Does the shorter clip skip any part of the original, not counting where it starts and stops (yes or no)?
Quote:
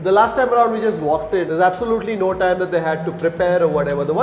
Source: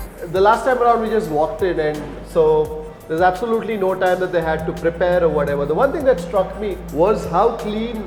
yes